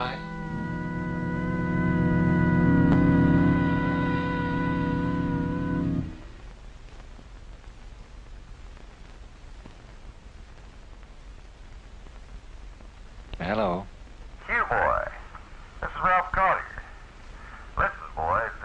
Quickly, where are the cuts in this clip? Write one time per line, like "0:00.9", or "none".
0:13.3